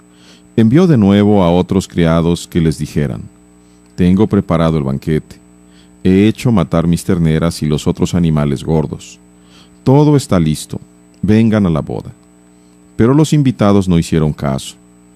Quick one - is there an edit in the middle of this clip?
no; 0 cuts

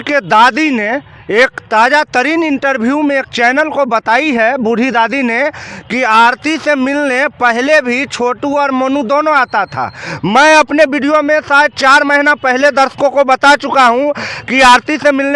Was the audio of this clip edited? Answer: no; 0 cuts

